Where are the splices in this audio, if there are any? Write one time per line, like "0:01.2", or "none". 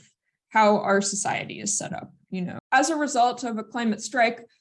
0:02.6